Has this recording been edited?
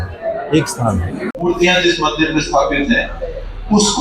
yes; 1 cut; at 1.3 s

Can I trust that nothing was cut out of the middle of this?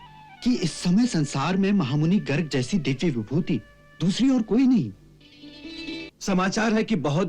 no; 1 cut; at 6.1 s

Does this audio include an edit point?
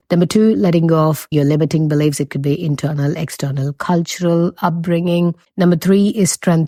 no; 0 cuts

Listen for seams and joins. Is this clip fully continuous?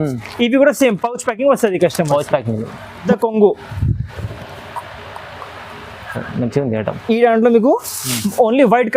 no; 1 cut; at 3.0 s

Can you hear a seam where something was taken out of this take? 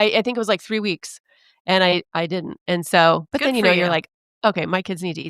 no; 0 cuts

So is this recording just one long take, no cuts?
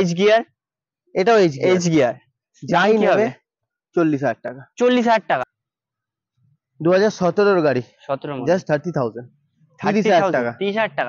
no; 1 cut; at 5.4 s

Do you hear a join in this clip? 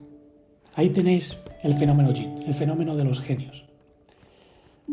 no; 0 cuts

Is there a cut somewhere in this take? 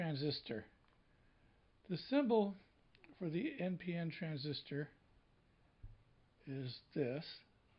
no; 0 cuts

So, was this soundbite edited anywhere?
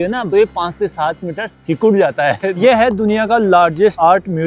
yes; 1 cut; at 2.6 s

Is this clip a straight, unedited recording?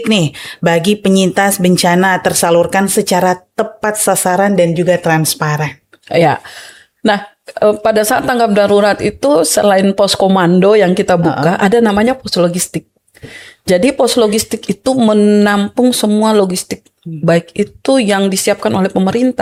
yes; 0 cuts

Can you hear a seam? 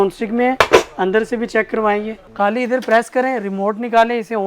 yes; 1 cut; at 2.2 s

